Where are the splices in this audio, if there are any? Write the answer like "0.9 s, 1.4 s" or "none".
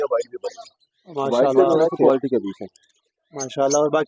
2.1 s